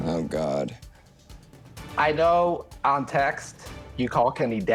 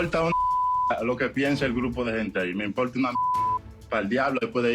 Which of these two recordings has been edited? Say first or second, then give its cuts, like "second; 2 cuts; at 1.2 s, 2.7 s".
second; 1 cut; at 3.8 s